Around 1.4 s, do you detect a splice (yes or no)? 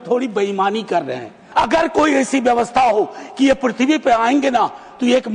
yes